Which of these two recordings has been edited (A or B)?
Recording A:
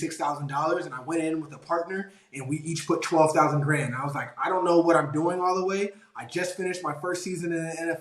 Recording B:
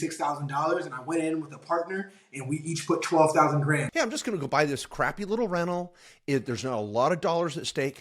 B